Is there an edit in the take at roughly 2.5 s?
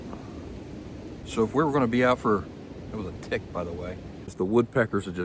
no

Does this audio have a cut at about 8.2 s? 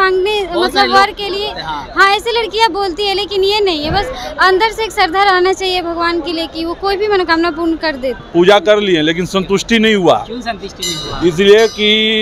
yes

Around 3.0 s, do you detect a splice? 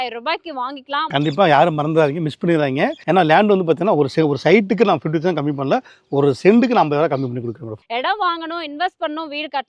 yes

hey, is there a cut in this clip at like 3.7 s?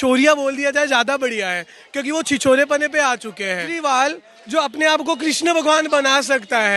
yes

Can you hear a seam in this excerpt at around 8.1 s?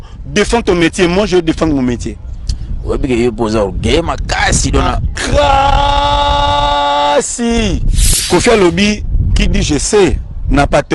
yes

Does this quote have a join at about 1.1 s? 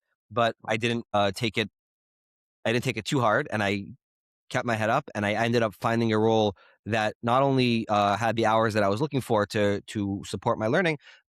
no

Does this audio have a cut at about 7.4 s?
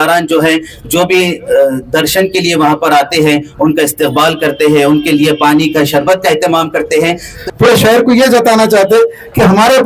yes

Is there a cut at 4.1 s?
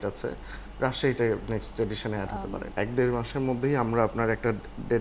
no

